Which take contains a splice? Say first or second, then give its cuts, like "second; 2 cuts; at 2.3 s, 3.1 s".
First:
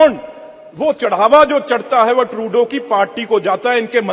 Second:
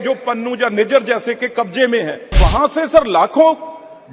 second; 1 cut; at 2.4 s